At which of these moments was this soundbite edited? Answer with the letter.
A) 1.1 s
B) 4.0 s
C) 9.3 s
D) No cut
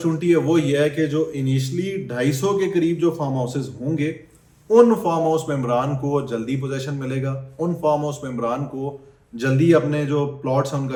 D